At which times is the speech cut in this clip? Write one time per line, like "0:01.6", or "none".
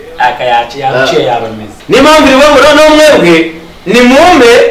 0:01.7